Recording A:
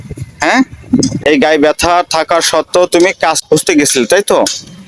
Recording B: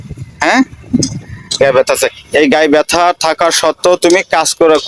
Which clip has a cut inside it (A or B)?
A